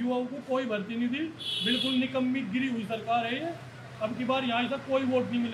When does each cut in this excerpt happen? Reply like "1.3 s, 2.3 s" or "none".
none